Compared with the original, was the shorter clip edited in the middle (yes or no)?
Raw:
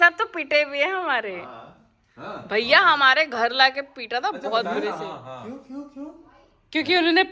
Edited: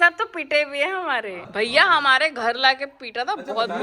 yes